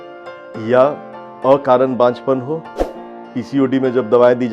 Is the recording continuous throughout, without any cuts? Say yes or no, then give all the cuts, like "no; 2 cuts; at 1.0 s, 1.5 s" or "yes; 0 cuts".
no; 1 cut; at 3.1 s